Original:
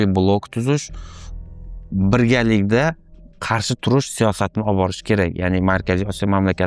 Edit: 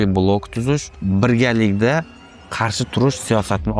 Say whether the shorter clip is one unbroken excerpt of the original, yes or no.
no